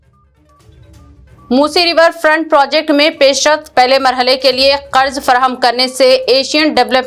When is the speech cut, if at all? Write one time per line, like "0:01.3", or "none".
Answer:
0:01.2